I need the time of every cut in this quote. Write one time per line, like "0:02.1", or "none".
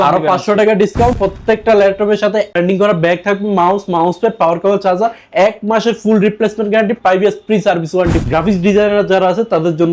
0:01.2
0:08.2